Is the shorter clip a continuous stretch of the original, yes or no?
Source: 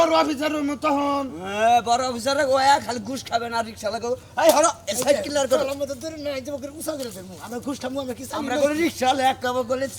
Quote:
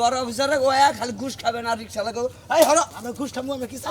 no